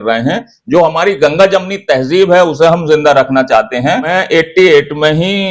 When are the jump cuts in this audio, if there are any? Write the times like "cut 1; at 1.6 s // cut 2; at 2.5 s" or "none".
cut 1; at 4.1 s